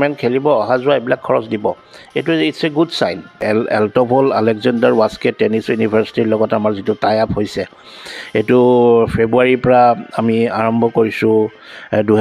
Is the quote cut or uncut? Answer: cut